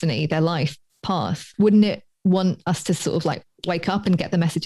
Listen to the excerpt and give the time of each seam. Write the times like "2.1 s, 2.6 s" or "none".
1.5 s